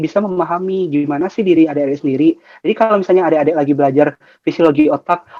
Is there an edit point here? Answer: no; 0 cuts

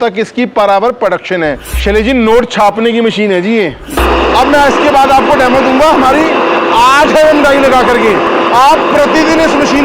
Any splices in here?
yes; 2 cuts; at 1.7 s, 3.9 s

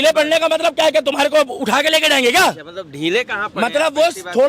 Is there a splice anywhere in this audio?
no; 0 cuts

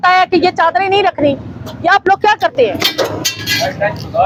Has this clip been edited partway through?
no; 0 cuts

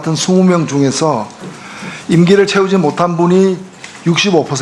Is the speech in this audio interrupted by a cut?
yes; 1 cut; at 3.2 s

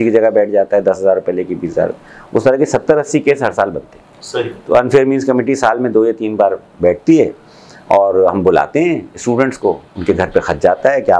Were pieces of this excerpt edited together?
no; 0 cuts

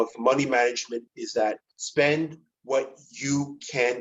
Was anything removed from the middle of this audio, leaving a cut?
no; 0 cuts

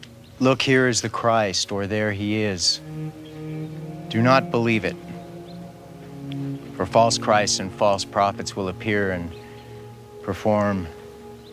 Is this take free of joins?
yes; 0 cuts

